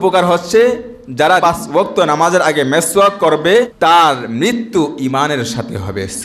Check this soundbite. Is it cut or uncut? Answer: cut